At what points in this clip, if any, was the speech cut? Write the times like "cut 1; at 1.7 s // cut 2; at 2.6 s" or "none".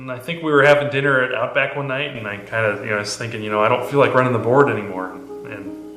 cut 1; at 1.3 s